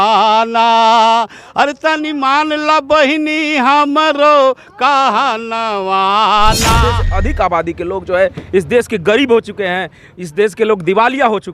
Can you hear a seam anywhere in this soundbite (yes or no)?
yes